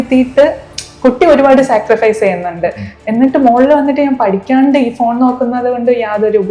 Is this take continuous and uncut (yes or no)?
yes